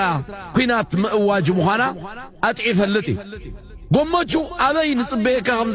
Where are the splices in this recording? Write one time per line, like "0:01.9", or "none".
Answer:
none